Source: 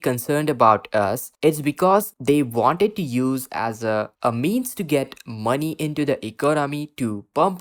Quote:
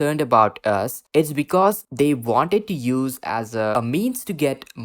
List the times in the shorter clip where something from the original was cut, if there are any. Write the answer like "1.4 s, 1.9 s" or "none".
3.7 s

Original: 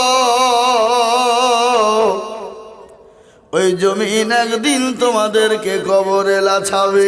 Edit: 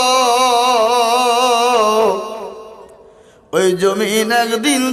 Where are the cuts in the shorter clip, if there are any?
none

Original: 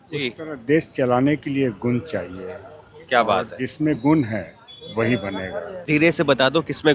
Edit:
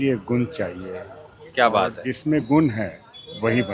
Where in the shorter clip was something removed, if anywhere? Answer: none

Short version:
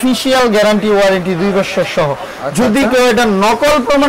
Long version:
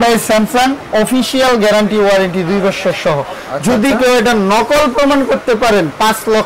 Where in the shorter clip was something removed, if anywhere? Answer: none

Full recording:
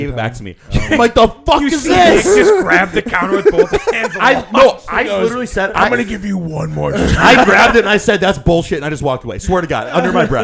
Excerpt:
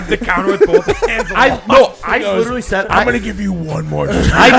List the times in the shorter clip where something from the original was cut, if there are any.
none

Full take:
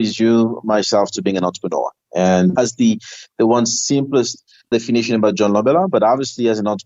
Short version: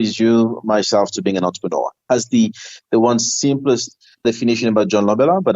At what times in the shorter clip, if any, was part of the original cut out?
2.1 s

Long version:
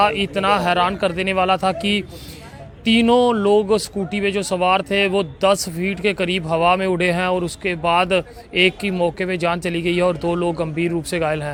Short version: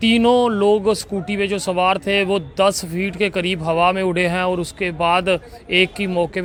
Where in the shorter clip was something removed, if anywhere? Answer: none

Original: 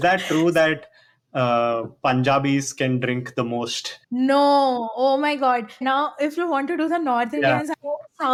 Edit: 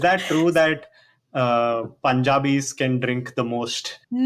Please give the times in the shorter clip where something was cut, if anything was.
none

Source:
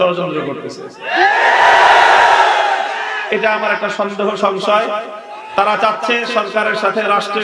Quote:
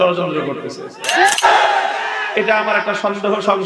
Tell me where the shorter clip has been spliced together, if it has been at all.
1.4 s

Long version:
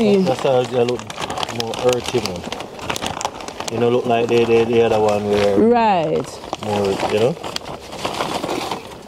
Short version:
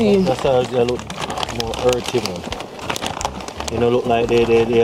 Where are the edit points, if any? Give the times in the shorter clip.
none

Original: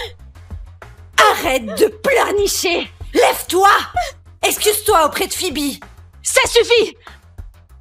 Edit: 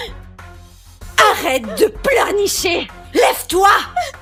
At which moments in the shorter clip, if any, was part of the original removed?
none

